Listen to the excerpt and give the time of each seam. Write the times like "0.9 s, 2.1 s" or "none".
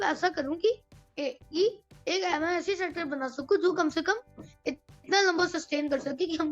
none